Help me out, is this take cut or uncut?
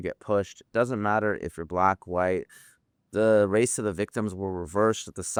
uncut